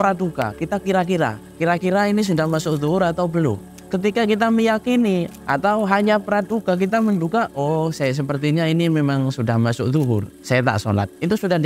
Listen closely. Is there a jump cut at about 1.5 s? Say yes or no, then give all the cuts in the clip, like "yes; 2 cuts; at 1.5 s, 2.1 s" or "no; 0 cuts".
no; 3 cuts; at 3.7 s, 5.4 s, 10.3 s